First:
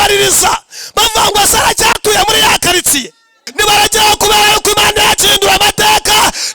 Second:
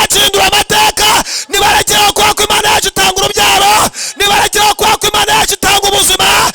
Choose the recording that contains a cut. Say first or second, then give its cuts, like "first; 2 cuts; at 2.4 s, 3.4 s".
first; 1 cut; at 3.4 s